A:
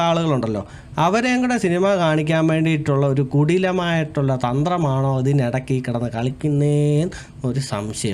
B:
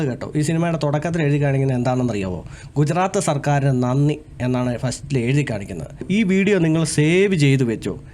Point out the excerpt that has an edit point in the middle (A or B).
B